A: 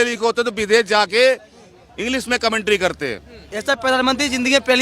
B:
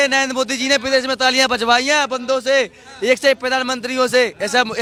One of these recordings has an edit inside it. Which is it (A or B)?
A